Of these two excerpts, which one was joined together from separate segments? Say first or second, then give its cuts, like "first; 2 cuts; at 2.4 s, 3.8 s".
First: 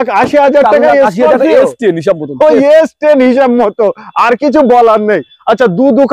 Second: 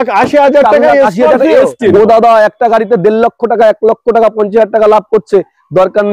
second; 1 cut; at 1.9 s